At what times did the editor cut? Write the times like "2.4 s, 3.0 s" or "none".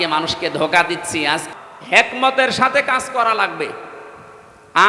1.4 s